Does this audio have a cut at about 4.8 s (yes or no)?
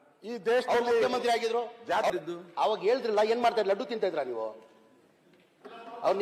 no